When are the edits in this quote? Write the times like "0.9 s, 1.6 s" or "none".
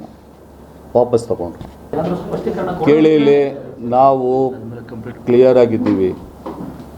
1.9 s